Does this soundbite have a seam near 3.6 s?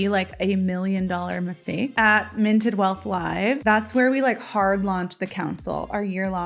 no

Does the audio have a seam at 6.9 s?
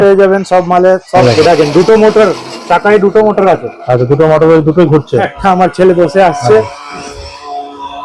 no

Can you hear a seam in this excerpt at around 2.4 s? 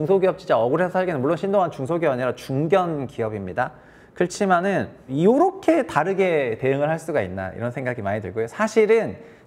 no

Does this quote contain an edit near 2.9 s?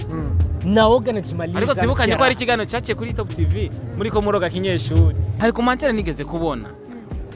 no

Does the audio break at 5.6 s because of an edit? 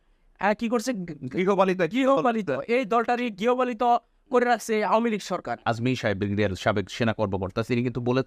yes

